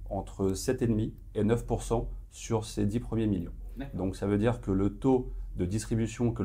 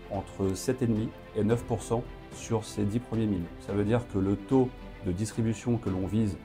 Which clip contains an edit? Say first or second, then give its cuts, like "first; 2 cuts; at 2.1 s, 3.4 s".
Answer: second; 1 cut; at 3.6 s